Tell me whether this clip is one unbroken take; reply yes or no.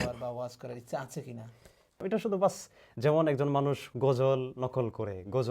no